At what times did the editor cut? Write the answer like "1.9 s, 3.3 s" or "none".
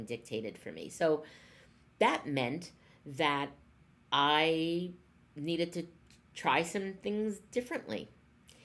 none